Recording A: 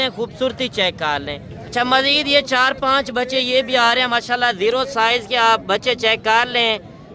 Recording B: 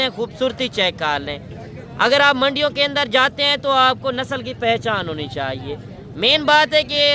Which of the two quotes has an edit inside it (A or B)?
A